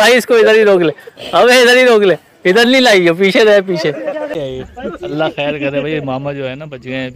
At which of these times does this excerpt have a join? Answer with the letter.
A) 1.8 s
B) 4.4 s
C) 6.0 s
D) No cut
B